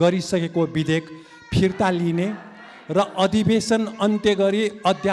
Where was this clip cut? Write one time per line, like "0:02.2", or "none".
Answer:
none